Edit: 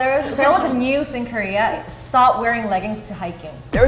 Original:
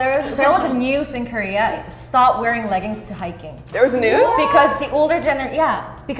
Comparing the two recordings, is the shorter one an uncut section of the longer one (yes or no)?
yes